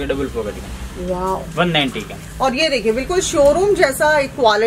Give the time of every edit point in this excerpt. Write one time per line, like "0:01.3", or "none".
none